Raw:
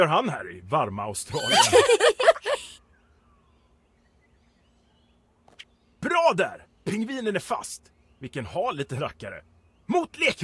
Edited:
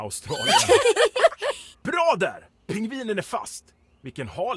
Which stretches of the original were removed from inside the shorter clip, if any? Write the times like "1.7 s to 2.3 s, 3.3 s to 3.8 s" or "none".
2.7 s to 5.9 s